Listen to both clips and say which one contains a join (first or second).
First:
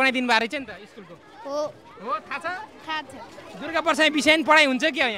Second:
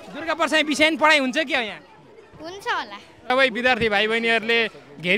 second